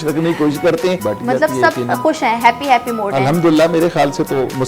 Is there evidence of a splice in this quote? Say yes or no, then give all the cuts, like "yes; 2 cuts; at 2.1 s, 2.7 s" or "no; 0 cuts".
yes; 1 cut; at 1.0 s